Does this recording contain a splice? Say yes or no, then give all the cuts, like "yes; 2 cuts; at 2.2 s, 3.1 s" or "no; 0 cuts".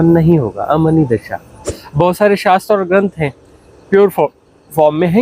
yes; 1 cut; at 1.8 s